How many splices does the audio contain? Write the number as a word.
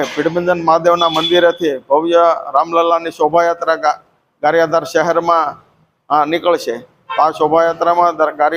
one